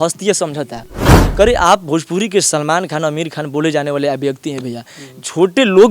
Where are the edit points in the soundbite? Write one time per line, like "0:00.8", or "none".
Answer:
0:01.2